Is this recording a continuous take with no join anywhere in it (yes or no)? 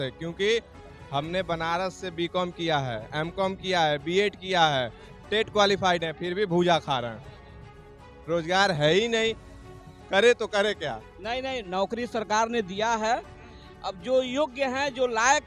no